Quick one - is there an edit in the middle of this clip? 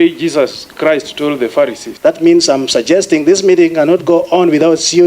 yes; 1 cut; at 1.8 s

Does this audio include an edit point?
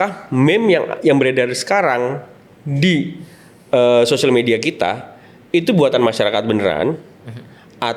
no; 0 cuts

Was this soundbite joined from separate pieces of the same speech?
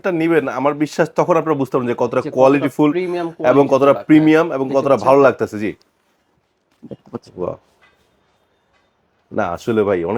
no; 0 cuts

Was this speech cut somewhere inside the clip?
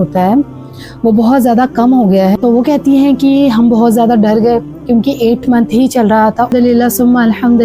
yes; 2 cuts; at 2.4 s, 6.5 s

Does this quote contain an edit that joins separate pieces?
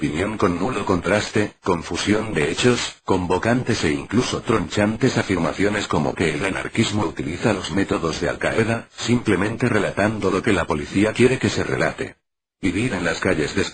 no; 0 cuts

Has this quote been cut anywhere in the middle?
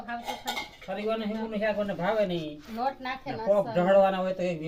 no; 0 cuts

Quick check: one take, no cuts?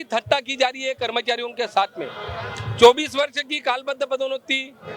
yes; 0 cuts

